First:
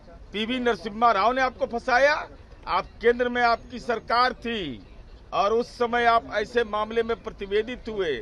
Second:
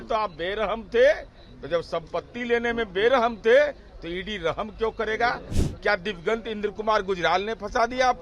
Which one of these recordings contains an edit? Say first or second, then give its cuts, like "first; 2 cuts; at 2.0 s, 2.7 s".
second; 1 cut; at 5.5 s